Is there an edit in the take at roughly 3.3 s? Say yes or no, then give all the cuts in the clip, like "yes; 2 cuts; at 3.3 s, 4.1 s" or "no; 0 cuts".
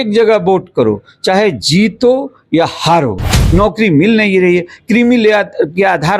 yes; 1 cut; at 3.3 s